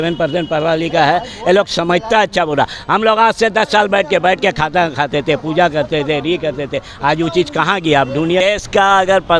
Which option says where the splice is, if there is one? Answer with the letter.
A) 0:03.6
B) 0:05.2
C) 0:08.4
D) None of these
C